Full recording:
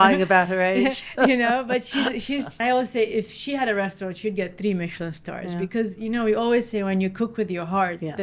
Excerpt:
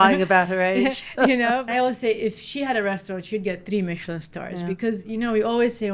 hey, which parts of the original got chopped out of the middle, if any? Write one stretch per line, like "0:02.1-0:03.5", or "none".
0:01.6-0:02.6